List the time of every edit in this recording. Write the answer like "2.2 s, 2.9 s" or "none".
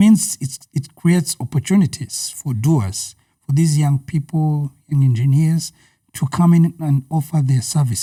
none